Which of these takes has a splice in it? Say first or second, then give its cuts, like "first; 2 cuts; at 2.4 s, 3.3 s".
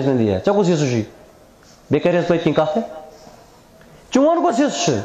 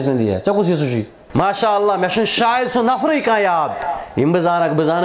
second; 1 cut; at 1.2 s